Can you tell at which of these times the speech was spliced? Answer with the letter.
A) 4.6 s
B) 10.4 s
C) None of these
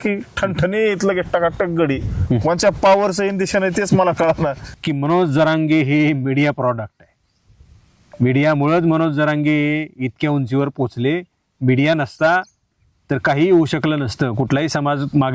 A